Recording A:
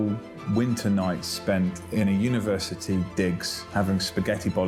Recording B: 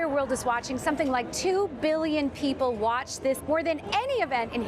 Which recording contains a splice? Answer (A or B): B